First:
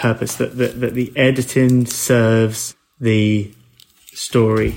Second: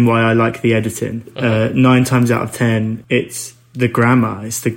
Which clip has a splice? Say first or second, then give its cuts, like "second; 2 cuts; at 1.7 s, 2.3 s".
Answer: second; 2 cuts; at 1.3 s, 3.0 s